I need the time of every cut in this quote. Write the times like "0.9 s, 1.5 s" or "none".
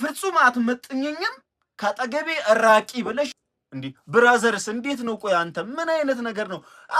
3.4 s